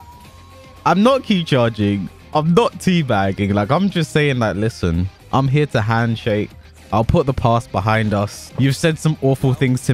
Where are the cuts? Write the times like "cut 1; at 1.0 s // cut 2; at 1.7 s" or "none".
cut 1; at 8.4 s